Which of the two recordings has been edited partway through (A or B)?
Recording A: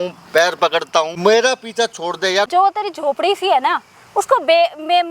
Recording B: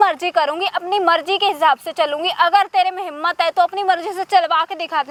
A